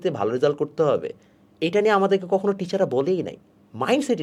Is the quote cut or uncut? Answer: uncut